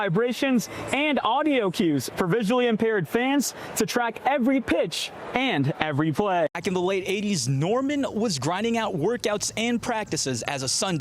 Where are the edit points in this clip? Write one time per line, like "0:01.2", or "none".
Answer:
0:06.6